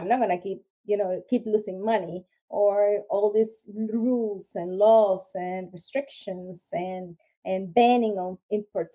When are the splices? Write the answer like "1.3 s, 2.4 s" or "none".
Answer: none